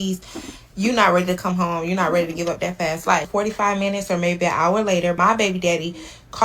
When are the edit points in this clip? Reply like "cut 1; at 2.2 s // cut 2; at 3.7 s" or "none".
cut 1; at 3.3 s // cut 2; at 5.2 s